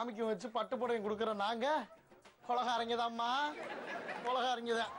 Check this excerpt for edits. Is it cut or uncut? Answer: uncut